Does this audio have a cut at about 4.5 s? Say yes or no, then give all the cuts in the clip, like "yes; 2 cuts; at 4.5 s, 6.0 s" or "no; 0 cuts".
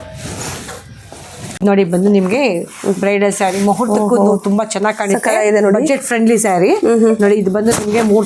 no; 1 cut; at 1.5 s